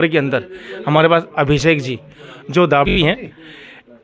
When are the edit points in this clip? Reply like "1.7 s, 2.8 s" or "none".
2.9 s